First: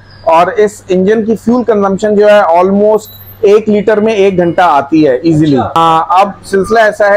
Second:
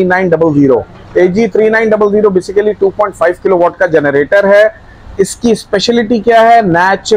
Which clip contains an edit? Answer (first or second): first